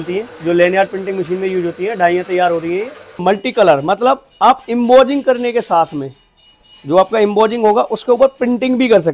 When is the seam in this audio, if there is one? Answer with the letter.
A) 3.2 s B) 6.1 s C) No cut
A